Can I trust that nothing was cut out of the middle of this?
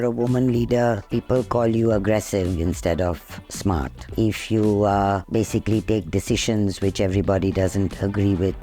yes; 0 cuts

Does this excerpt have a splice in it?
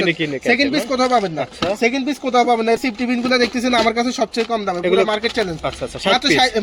no; 0 cuts

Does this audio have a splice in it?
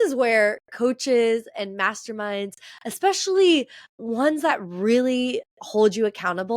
no; 0 cuts

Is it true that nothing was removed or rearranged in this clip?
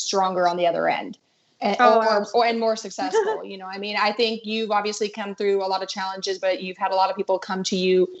yes; 0 cuts

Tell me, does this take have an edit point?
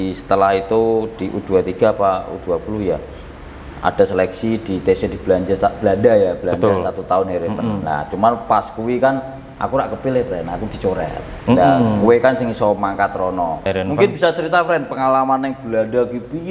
yes; 1 cut; at 13.7 s

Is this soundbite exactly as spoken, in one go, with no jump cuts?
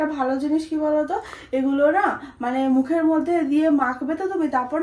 yes; 0 cuts

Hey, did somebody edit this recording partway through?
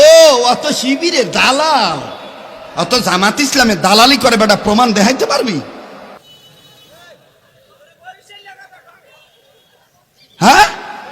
no; 0 cuts

